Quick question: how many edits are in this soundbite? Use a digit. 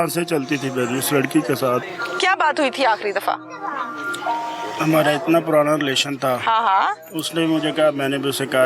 1